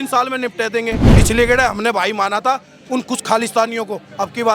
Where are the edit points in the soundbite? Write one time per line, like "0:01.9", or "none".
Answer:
0:01.0

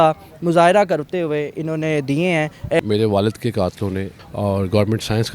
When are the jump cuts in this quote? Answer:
0:02.8
0:04.1

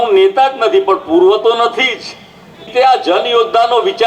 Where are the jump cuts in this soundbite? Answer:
0:02.7

